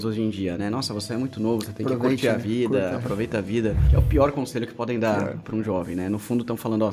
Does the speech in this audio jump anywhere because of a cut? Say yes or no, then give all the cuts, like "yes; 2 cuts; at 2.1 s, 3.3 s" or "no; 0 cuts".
yes; 1 cut; at 3.8 s